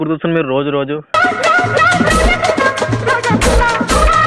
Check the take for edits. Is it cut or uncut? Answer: cut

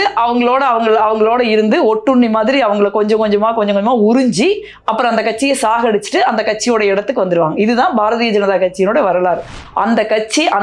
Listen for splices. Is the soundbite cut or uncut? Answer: cut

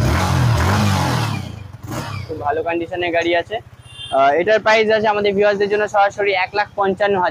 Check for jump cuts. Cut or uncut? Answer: uncut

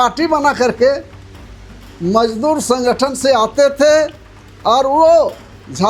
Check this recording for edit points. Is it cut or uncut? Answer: uncut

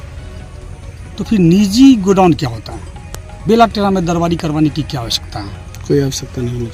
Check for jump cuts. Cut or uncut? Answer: uncut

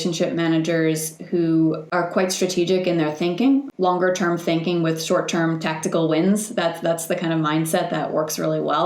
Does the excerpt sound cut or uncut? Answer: cut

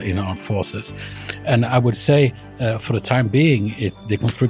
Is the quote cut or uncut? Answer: uncut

